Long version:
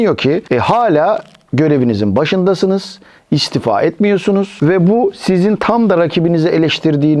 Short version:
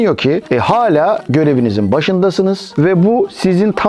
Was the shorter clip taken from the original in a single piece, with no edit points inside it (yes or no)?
no